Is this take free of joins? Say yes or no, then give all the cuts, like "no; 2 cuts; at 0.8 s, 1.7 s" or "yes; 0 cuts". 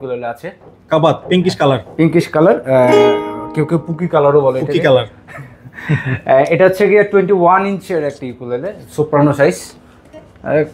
yes; 0 cuts